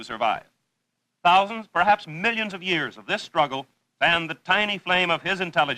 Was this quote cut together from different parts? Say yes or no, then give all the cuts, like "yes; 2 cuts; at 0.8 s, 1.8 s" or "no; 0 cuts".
yes; 1 cut; at 3.9 s